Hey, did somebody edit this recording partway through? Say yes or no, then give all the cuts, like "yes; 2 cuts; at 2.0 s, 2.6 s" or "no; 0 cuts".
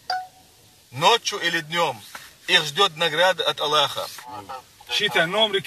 yes; 1 cut; at 4.5 s